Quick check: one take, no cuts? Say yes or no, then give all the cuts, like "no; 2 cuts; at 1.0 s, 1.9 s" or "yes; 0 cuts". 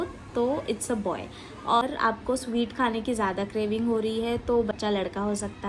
no; 2 cuts; at 1.8 s, 4.8 s